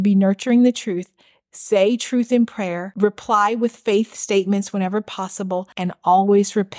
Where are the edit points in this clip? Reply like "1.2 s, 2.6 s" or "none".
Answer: 2.8 s, 5.7 s